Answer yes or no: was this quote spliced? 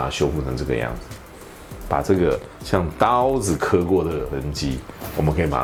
no